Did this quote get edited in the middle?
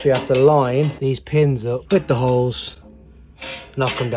yes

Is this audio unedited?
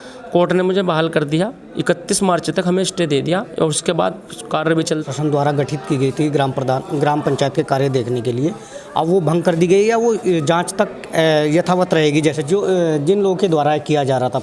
no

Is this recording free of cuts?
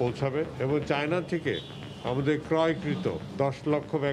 yes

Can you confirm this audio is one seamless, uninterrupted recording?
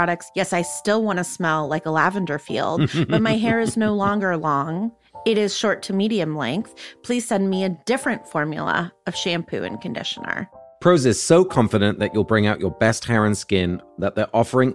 yes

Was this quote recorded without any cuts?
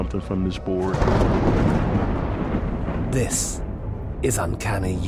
yes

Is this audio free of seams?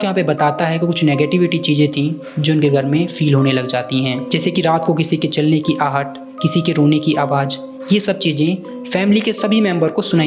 yes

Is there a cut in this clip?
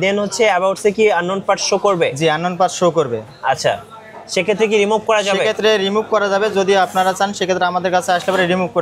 no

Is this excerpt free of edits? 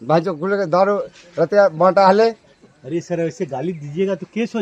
yes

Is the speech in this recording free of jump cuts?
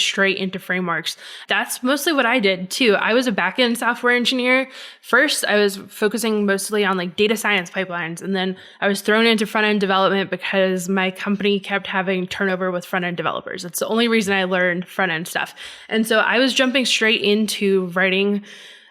no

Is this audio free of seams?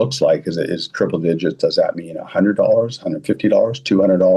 yes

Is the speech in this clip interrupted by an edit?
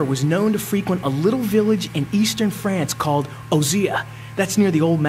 yes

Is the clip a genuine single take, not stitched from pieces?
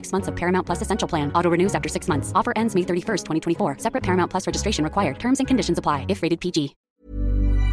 no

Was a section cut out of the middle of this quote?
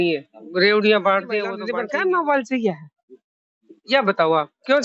yes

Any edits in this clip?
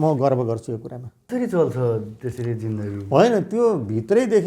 yes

